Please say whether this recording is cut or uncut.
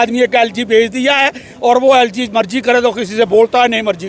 uncut